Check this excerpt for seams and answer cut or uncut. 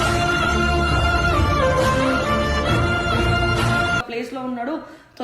cut